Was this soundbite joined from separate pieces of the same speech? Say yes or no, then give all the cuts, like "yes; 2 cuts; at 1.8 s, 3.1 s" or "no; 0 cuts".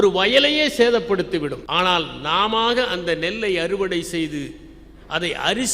yes; 1 cut; at 1.6 s